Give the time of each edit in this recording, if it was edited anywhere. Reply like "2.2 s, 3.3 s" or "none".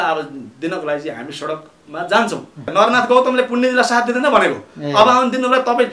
2.7 s